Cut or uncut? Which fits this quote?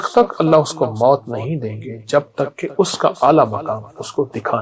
uncut